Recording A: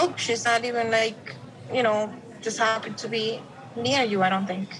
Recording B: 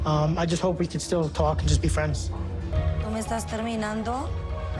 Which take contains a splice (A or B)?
B